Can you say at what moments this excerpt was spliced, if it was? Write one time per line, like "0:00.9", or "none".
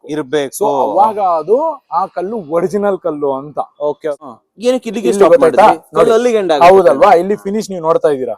0:04.0